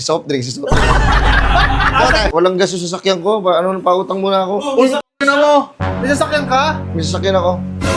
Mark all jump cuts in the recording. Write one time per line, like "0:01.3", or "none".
0:02.3